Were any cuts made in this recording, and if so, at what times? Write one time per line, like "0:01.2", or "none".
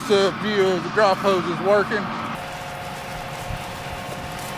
0:02.4